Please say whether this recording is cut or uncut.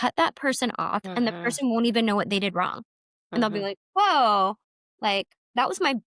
uncut